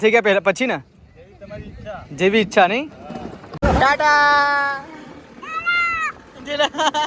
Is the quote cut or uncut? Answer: cut